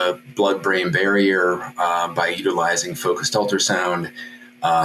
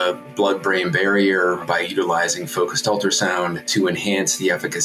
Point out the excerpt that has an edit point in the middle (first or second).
second